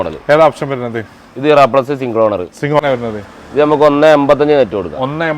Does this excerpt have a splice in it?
yes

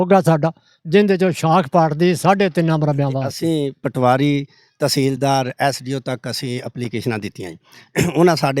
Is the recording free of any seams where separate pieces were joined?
no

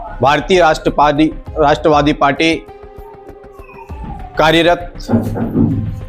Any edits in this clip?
no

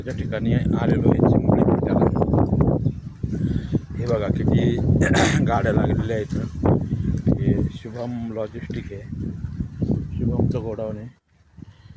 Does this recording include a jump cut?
no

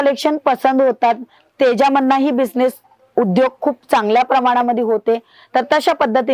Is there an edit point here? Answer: no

